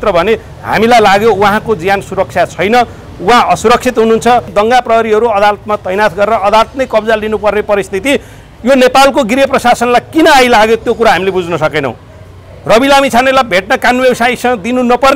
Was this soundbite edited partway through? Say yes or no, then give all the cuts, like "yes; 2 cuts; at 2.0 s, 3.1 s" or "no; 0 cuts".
yes; 1 cut; at 4.5 s